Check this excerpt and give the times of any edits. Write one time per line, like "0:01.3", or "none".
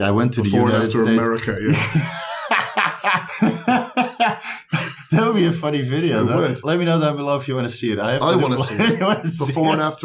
0:03.3
0:06.6

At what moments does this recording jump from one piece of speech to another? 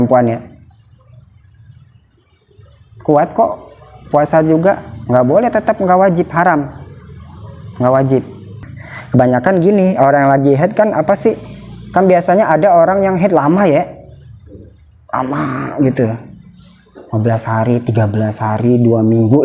0:08.7

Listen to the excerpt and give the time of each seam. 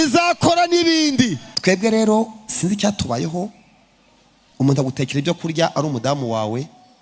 0:01.5

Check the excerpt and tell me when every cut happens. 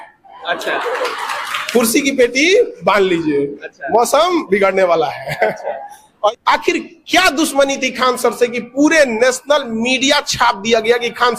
0:06.3

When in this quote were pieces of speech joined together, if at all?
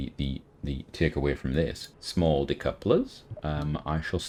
none

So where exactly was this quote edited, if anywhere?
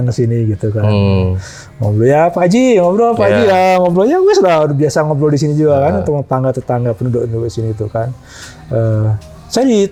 none

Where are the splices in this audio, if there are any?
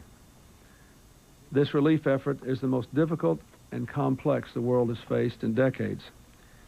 none

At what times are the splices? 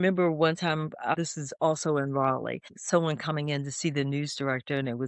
0:01.1
0:02.7

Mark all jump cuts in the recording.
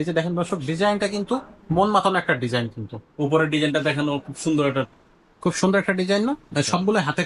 none

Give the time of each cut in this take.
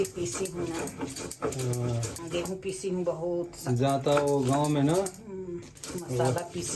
none

